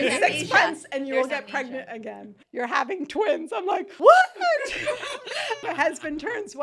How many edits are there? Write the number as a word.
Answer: three